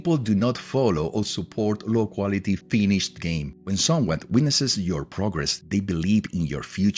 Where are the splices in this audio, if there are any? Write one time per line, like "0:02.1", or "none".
0:03.5
0:05.5

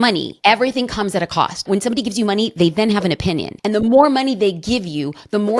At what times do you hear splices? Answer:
0:01.7
0:03.5

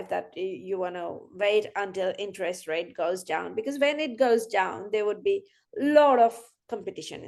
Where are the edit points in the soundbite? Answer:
none

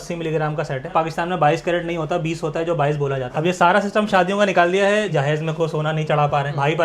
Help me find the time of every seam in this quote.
0:00.9
0:03.3
0:05.1

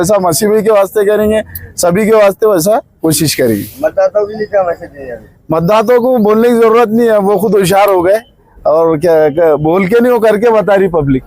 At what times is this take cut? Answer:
none

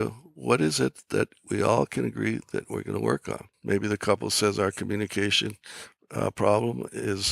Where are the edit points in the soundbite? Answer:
0:03.5

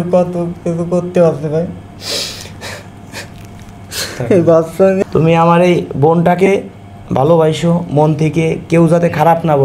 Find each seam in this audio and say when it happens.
0:05.0

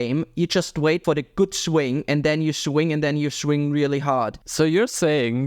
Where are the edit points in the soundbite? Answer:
0:01.0
0:04.4

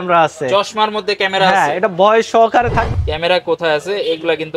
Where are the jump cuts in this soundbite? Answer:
0:02.9

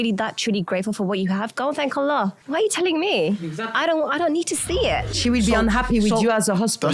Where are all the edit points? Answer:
0:02.4
0:05.1

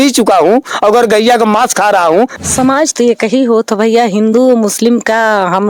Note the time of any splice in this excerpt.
0:02.3

